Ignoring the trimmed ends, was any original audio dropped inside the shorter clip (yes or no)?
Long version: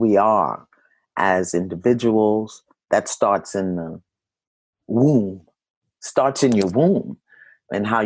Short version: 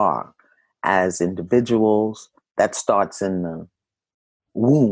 no